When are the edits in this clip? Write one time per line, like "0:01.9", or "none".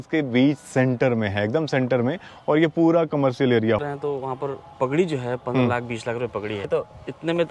0:03.8
0:06.7